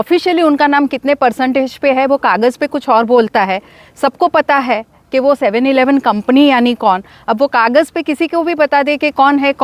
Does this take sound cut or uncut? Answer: uncut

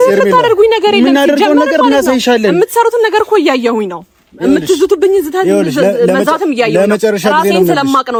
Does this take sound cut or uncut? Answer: uncut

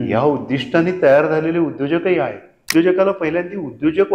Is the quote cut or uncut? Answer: cut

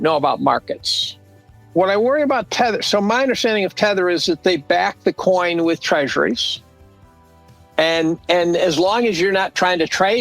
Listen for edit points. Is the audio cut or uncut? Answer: cut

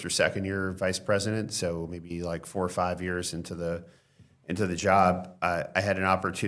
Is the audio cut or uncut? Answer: uncut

